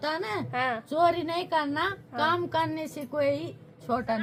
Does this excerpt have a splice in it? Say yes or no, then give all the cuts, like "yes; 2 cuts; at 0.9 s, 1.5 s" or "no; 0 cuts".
no; 0 cuts